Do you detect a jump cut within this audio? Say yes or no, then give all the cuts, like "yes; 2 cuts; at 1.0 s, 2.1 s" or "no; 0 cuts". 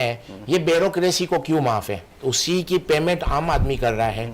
yes; 1 cut; at 2.1 s